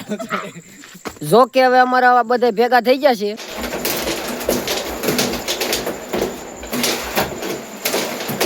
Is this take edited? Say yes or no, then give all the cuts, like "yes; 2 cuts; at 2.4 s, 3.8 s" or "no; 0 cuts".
yes; 1 cut; at 3.5 s